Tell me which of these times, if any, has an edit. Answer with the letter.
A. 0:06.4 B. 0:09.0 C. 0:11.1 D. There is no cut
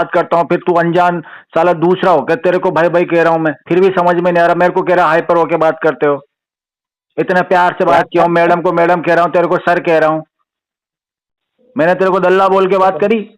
D